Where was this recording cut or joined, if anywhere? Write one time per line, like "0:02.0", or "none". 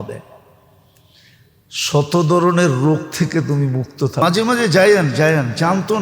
0:04.2